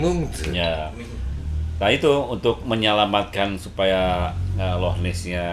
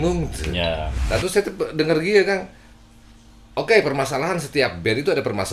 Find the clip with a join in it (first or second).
second